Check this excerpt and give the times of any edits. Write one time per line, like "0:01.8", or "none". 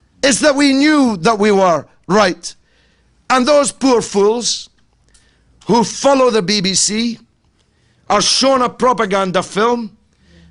none